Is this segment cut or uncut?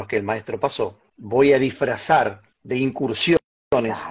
cut